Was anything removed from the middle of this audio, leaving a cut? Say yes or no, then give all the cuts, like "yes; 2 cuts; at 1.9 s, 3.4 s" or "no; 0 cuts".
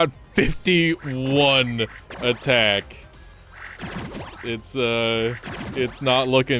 no; 0 cuts